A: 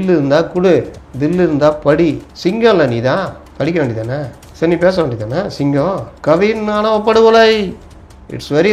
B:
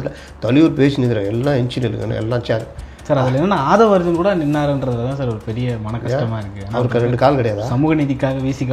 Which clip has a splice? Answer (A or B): A